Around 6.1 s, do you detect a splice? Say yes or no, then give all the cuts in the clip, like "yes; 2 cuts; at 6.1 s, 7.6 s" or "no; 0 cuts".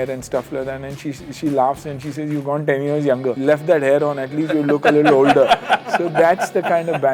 no; 1 cut; at 3.4 s